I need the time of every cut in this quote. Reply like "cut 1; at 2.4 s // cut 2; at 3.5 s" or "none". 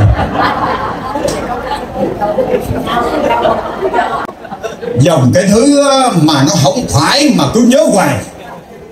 cut 1; at 4.3 s